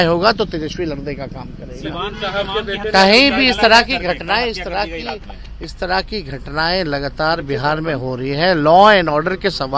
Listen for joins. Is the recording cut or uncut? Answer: uncut